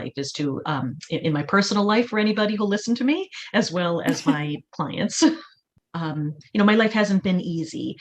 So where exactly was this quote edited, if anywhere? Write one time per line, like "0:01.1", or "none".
0:05.7